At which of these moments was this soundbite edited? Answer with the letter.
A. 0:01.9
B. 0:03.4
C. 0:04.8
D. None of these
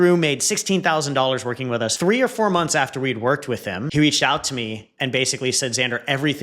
A